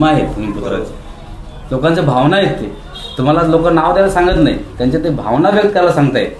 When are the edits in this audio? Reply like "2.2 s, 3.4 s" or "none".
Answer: none